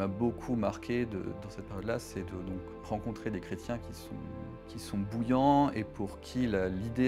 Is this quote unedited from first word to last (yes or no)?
yes